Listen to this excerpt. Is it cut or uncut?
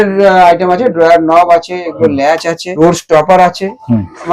cut